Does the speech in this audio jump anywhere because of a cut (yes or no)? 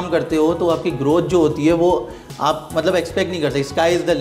no